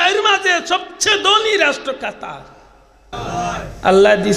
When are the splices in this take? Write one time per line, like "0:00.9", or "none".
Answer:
0:03.1